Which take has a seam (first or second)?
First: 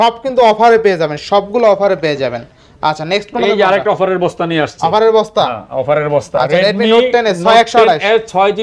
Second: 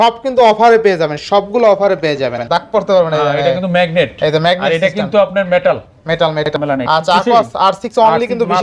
second